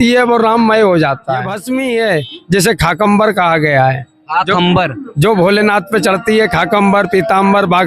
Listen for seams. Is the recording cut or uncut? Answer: cut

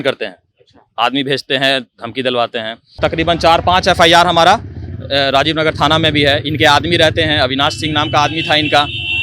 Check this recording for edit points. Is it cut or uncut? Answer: cut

